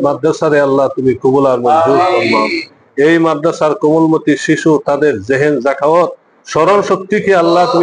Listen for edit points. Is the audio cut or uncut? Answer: uncut